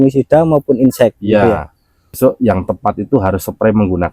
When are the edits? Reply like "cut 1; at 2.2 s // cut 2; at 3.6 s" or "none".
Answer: cut 1; at 2.1 s